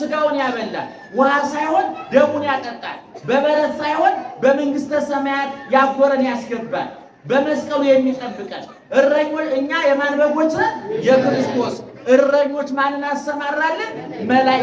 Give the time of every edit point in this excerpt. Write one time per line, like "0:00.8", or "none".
none